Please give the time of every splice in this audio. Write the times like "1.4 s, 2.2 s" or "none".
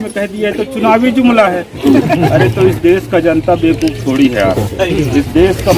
none